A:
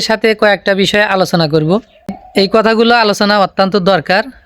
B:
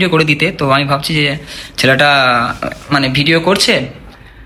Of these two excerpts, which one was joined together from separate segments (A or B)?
A